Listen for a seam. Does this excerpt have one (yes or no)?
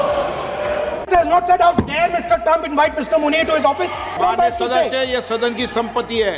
yes